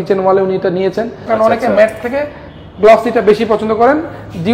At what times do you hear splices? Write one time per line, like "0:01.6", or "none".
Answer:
0:01.2